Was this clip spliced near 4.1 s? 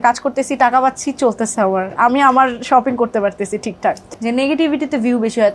yes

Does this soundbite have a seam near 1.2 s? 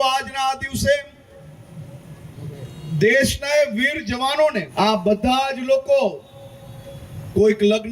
no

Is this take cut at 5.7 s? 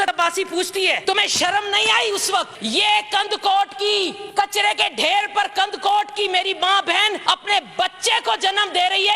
no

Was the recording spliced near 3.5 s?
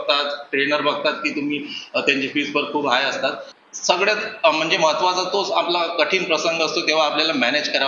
yes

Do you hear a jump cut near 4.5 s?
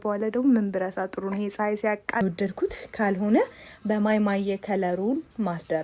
no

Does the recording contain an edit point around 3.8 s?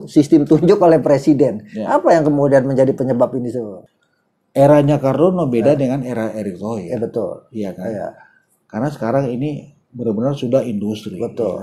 yes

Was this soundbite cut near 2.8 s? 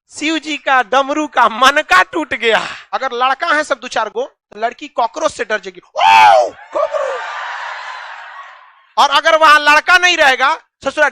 yes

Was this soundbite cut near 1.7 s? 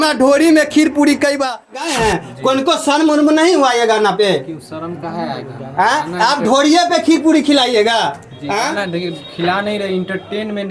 yes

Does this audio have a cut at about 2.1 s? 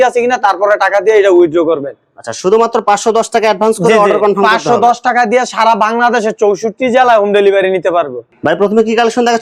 no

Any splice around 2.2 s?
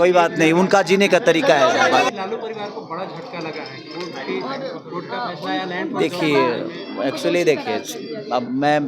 yes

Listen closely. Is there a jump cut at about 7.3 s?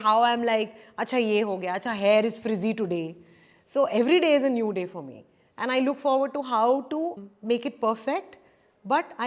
yes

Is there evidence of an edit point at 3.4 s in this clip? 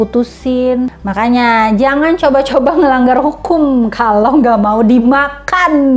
no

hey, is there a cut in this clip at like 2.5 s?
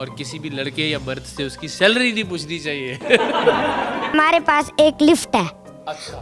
no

